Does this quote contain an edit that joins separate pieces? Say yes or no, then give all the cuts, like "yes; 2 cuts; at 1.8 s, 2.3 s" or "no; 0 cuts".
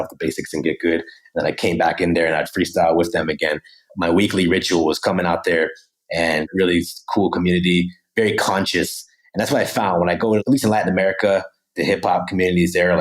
yes; 1 cut; at 6.5 s